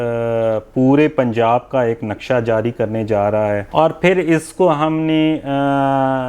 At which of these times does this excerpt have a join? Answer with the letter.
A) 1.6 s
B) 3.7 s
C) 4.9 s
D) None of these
B